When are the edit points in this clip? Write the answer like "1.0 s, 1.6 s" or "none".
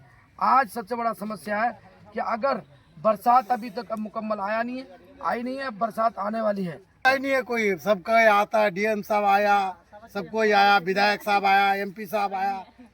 7.0 s